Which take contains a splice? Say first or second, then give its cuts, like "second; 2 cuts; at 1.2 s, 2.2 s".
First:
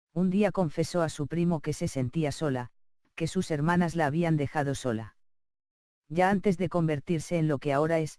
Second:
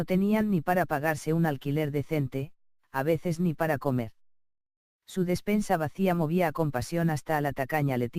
second; 1 cut; at 3.8 s